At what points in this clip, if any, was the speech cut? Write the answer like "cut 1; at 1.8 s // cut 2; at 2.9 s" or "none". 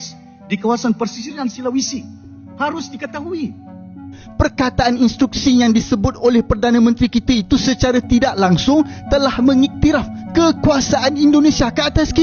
cut 1; at 4.1 s